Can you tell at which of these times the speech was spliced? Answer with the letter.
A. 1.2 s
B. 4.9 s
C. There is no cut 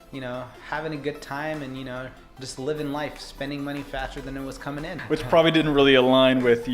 B